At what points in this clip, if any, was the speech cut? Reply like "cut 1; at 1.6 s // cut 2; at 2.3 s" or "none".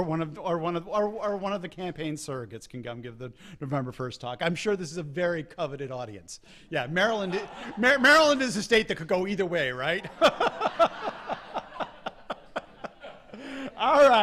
none